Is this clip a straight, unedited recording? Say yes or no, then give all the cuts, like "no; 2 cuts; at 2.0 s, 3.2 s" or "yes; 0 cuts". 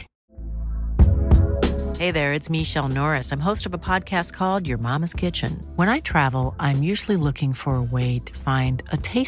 yes; 0 cuts